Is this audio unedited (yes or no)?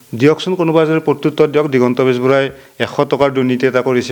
yes